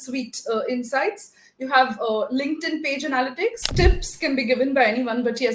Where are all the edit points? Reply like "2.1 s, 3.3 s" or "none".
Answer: 3.7 s